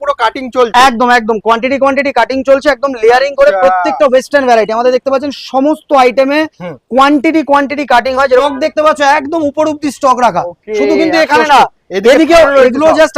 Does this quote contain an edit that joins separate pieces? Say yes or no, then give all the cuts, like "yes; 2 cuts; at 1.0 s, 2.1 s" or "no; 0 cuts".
yes; 1 cut; at 8.4 s